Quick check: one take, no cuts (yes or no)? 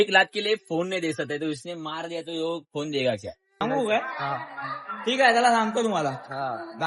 no